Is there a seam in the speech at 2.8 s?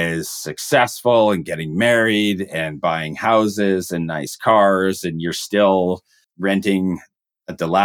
no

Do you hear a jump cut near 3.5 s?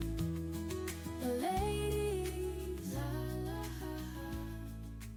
no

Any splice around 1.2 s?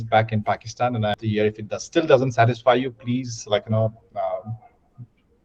yes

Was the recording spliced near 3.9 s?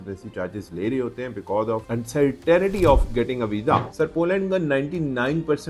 yes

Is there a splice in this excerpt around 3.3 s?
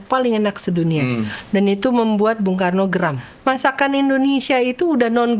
yes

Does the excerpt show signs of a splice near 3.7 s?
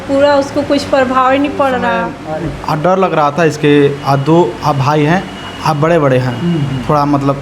no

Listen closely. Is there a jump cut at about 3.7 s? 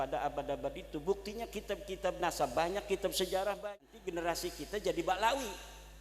yes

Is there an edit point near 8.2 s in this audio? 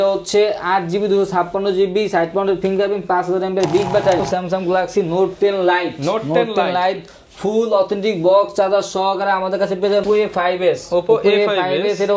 no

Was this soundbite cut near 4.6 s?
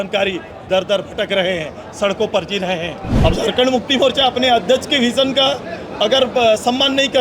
no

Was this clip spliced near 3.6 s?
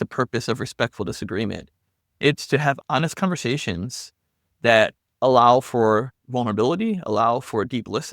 no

